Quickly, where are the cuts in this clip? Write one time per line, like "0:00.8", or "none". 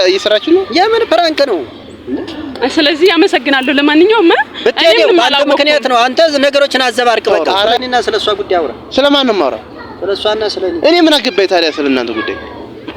0:07.7

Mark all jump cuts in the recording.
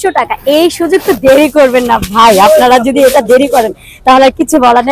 none

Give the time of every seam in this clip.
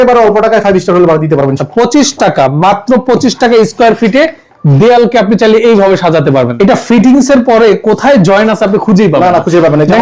0:01.6
0:06.5

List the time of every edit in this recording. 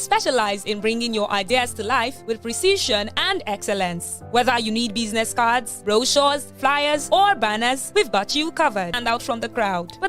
0:09.0

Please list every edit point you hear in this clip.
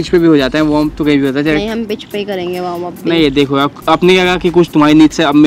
none

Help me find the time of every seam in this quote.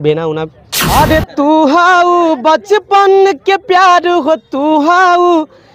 0:00.9

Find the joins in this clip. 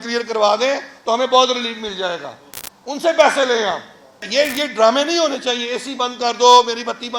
0:04.3

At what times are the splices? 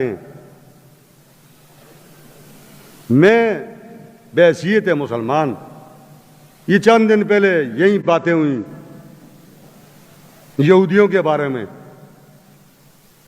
0:08.0

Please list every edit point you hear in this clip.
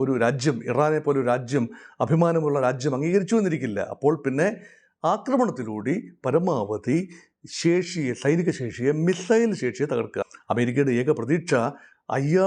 0:10.2

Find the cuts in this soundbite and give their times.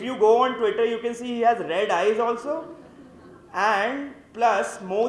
none

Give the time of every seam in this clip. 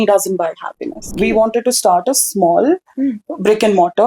0:01.1

